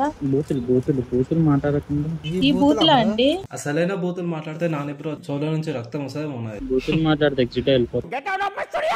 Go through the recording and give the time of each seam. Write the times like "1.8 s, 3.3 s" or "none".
3.4 s, 6.6 s